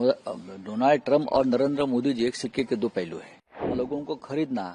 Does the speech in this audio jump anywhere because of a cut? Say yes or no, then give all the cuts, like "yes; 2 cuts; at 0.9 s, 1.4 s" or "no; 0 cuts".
yes; 1 cut; at 3.6 s